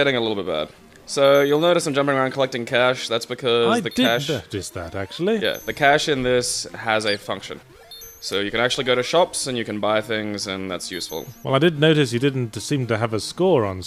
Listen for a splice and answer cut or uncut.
cut